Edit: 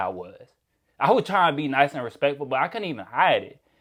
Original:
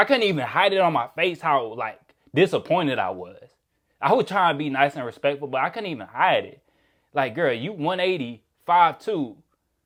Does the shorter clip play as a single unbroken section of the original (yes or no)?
yes